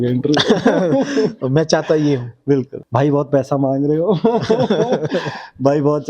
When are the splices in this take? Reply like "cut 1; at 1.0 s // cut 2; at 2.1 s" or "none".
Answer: cut 1; at 2.8 s